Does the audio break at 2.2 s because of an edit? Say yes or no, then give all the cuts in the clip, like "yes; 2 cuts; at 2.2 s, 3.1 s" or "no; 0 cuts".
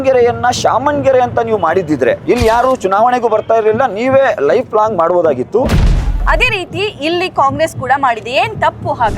yes; 2 cuts; at 2.2 s, 5.8 s